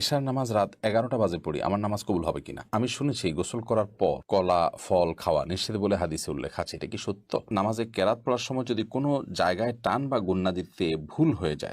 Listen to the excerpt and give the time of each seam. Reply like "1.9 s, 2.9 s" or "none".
2.6 s, 7.5 s